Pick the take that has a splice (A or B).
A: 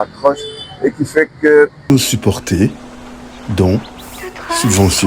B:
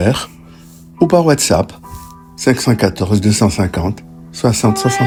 A